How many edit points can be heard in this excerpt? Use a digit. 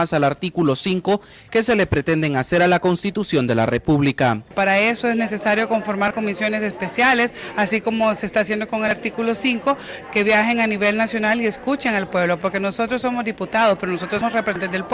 0